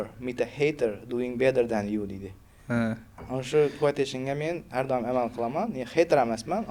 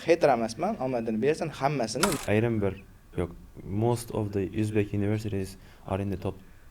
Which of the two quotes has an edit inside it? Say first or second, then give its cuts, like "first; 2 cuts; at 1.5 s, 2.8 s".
second; 1 cut; at 2.2 s